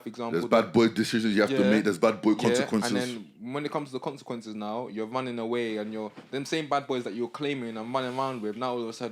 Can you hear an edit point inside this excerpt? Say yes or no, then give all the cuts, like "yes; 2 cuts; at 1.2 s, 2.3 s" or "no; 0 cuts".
no; 0 cuts